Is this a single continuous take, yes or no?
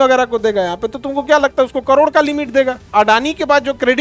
no